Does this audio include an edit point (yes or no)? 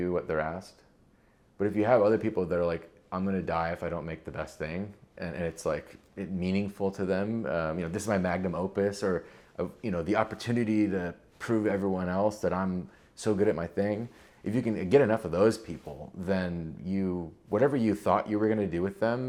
no